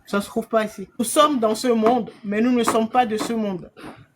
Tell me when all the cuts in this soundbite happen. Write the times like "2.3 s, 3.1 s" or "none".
1.0 s

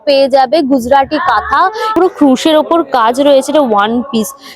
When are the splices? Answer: 1.9 s

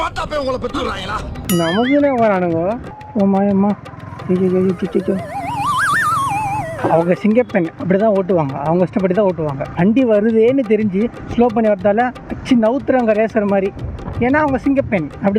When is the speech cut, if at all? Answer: 2.9 s, 5.3 s, 6.7 s

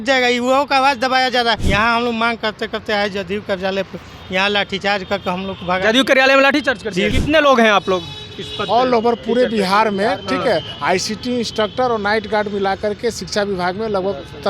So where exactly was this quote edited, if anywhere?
1.6 s, 7.1 s

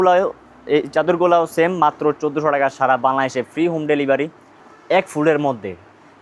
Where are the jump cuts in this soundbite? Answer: 4.7 s

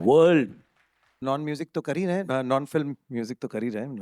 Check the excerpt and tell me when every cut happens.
1.1 s

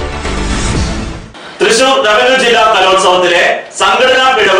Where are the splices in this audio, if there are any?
1.2 s

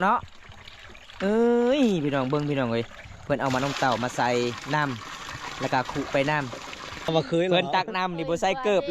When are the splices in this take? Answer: 7.1 s

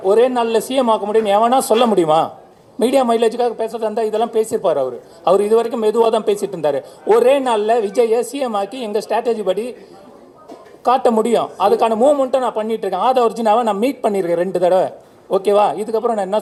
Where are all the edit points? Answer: none

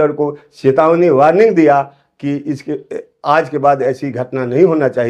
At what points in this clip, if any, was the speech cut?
none

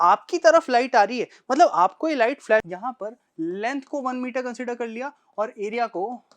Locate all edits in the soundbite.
2.6 s

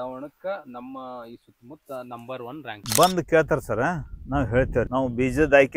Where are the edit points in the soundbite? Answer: 2.8 s, 4.9 s

